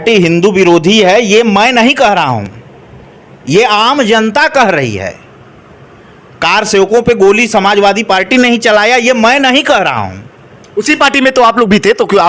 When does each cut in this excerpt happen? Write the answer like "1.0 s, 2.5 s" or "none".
none

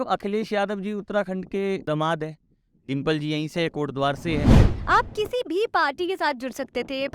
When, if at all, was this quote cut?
4.7 s

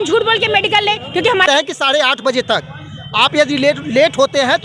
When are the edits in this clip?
1.5 s

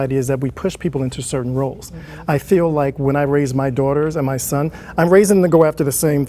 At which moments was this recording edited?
none

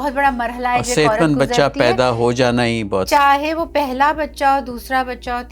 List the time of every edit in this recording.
3.0 s

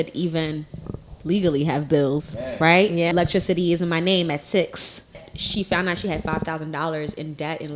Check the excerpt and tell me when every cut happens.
3.1 s, 5.2 s

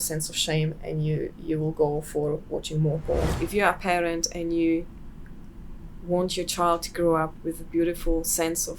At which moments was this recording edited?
3.3 s

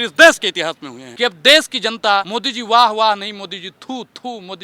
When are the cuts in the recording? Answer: 1.0 s, 2.4 s

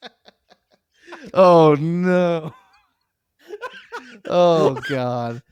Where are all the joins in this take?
none

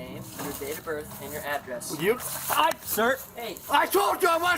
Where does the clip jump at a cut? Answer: none

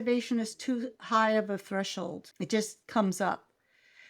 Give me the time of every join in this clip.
2.7 s

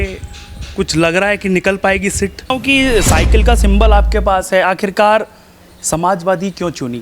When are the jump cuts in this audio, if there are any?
2.5 s

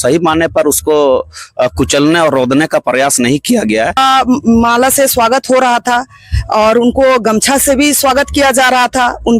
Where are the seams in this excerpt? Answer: 4.0 s

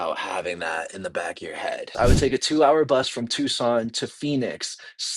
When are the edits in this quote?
1.9 s

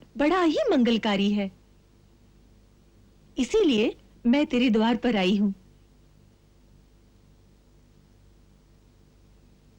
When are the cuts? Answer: none

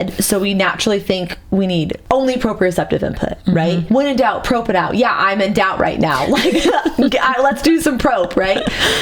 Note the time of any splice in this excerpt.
2.0 s, 3.8 s

